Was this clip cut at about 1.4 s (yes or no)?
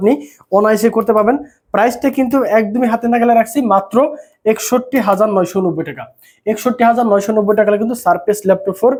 no